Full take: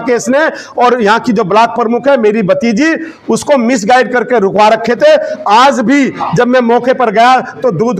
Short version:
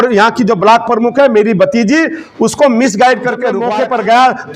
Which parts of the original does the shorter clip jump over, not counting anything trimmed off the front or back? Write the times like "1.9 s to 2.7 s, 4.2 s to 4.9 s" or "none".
4.5 s to 6.7 s

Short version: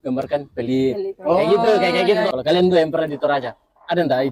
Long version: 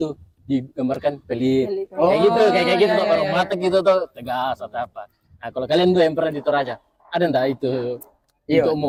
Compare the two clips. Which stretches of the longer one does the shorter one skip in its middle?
3.0 s to 5.5 s

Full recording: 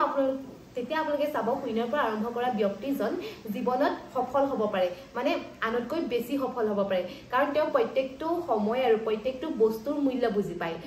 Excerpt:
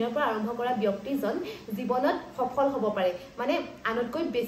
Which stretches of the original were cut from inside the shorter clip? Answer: none

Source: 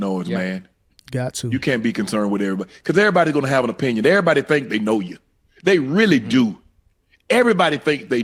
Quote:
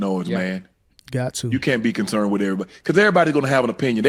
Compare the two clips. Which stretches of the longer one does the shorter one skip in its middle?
none

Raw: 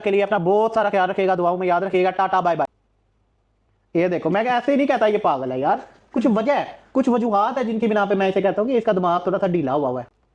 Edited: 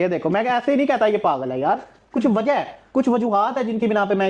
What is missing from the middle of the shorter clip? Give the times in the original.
none

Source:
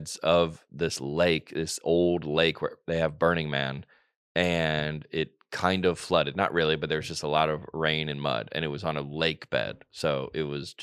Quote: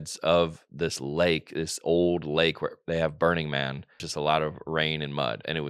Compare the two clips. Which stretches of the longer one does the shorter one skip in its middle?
4.0 s to 7.1 s

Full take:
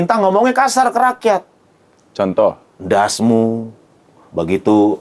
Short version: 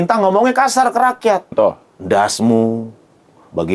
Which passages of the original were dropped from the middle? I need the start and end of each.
1.5 s to 2.3 s

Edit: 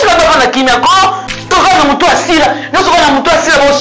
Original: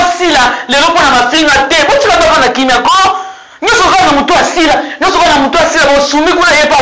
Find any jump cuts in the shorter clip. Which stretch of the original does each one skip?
3.5 s to 3.8 s

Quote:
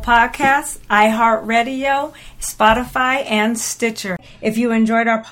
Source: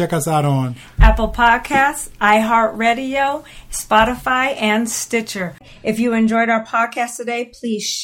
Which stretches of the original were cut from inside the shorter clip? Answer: 5.5 s to 5.7 s

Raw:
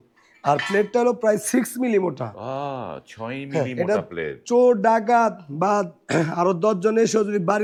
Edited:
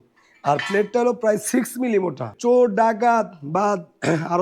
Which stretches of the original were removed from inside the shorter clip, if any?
2.3 s to 4.3 s

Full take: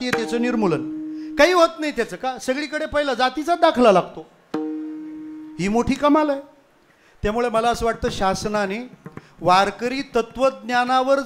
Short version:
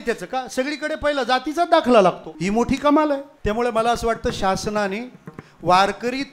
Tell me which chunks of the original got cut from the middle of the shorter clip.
4.2 s to 5.5 s, 6.5 s to 7.1 s

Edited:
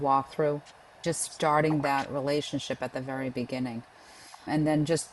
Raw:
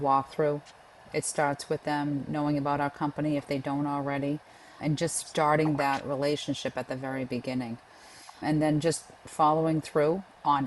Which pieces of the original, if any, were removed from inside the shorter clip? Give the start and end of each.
1.0 s to 5.0 s

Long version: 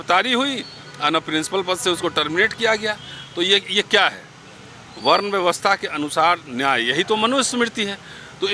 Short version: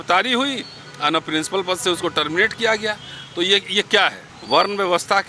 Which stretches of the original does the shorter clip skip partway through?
4.3 s to 4.8 s

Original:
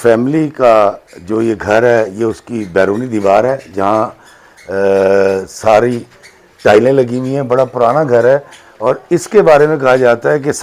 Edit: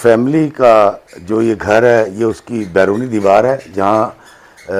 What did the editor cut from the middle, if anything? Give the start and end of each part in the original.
none

